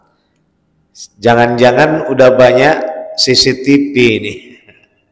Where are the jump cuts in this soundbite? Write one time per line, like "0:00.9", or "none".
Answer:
none